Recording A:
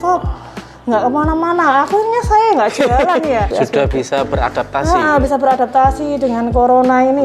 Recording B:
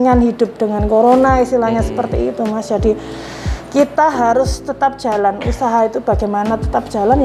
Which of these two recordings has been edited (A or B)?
A